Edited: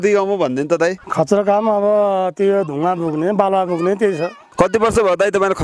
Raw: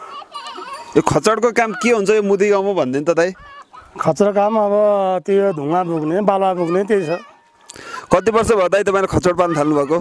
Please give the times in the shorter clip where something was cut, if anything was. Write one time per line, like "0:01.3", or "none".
0:01.0
0:04.4